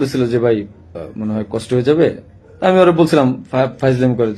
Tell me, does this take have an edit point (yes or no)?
no